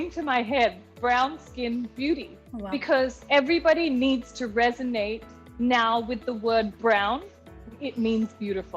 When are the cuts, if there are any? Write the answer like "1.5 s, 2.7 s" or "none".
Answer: none